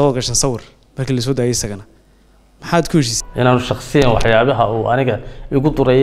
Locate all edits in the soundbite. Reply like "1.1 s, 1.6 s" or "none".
3.2 s